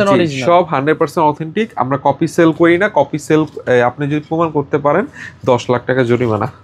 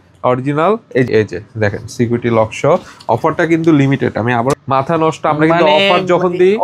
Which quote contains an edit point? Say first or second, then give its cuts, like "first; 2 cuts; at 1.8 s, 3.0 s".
second; 2 cuts; at 1.1 s, 4.5 s